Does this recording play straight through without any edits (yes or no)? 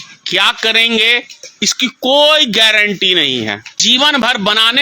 no